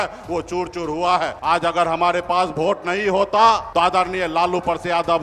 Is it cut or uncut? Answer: cut